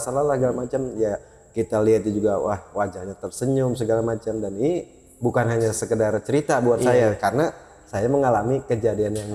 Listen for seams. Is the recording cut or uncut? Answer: uncut